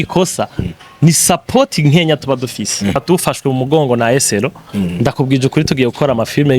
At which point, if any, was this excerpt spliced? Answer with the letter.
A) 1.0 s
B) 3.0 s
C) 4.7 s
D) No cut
B